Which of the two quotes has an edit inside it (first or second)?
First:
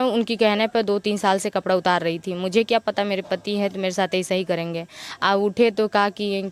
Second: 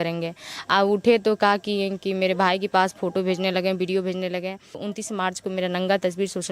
second